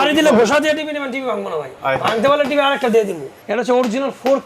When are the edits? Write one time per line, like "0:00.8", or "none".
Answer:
0:01.7
0:03.3

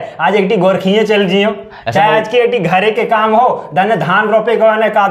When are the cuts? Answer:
none

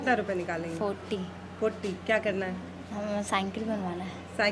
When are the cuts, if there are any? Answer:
none

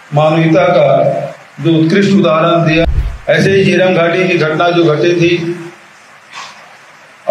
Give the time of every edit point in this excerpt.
0:02.8

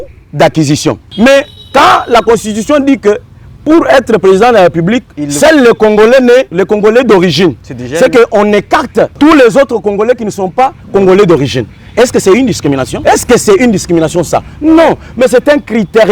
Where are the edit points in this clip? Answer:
0:01.1
0:06.5
0:09.1
0:12.9

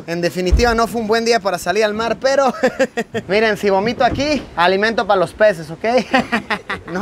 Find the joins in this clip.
0:03.2

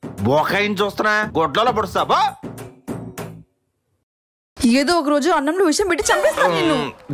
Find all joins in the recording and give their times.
none

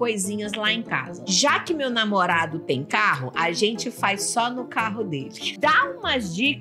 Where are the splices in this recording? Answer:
0:01.2
0:05.5

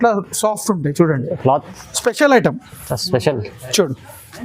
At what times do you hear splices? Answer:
0:01.7

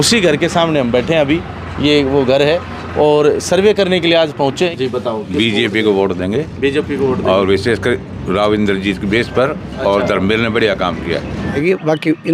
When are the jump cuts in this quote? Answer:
0:04.7
0:11.5

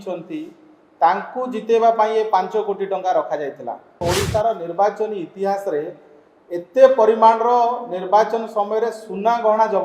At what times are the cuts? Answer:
0:04.0

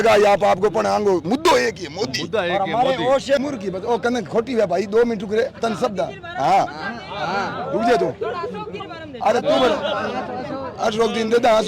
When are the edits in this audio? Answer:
0:03.4

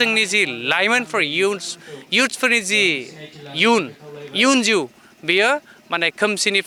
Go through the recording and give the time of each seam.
none

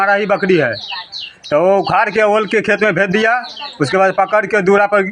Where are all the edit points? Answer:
none

